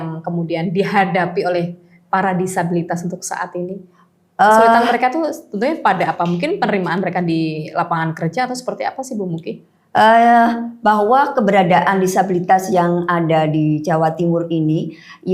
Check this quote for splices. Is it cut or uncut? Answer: uncut